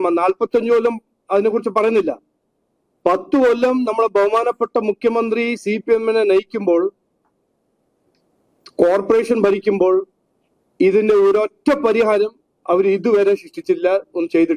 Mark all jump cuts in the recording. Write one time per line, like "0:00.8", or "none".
none

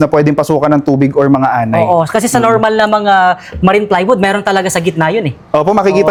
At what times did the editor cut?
none

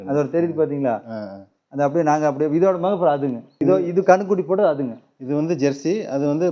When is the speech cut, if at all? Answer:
0:03.5

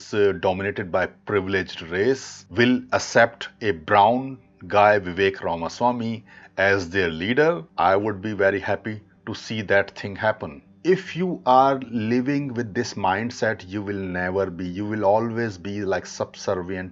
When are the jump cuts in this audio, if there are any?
0:02.4
0:07.7
0:10.6

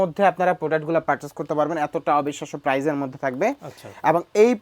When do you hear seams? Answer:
none

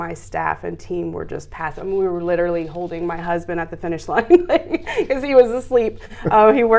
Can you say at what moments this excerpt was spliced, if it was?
none

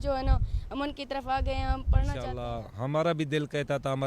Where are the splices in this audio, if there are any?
0:02.2

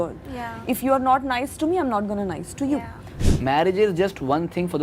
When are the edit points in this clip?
0:03.1

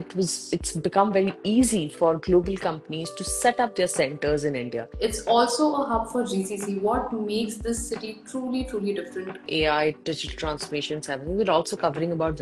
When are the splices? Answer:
0:04.9
0:09.5

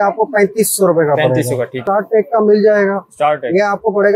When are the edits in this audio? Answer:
0:01.8

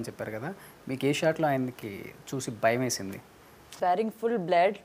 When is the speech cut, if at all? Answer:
0:03.7

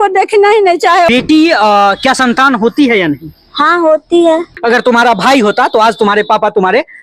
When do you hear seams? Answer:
0:01.1
0:04.5

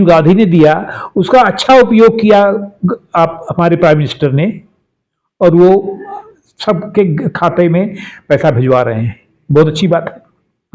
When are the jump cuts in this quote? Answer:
none

